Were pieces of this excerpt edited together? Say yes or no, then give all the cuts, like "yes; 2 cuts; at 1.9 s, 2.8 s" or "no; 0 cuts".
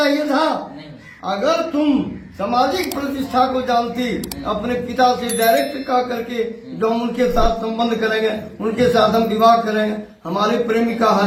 no; 0 cuts